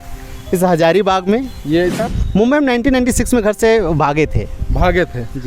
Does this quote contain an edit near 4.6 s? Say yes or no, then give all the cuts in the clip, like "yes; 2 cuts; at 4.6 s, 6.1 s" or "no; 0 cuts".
no; 1 cut; at 2.0 s